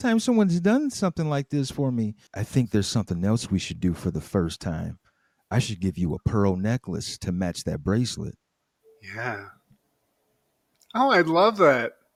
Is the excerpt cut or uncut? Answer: uncut